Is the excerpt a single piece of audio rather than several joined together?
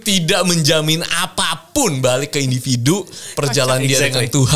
yes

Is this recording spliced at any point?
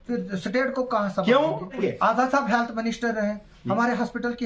yes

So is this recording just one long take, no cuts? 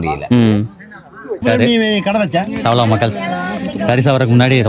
no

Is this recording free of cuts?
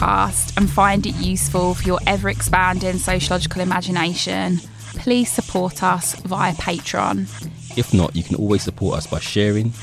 yes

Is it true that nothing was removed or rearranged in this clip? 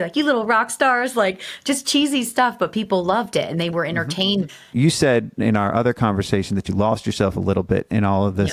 no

